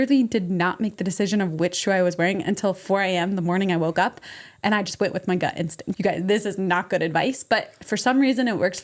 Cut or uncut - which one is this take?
cut